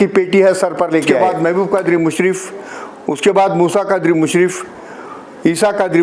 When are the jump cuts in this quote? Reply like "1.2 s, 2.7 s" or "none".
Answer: 1.2 s